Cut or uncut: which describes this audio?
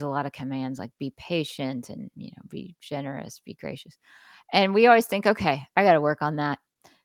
uncut